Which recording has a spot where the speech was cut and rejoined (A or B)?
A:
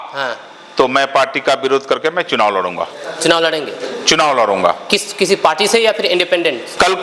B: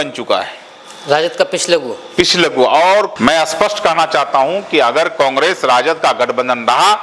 B